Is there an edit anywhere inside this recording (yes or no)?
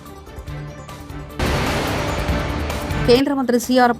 yes